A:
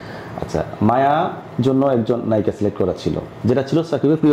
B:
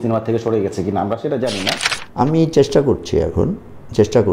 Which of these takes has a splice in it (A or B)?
B